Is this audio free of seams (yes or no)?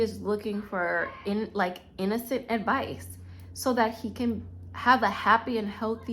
yes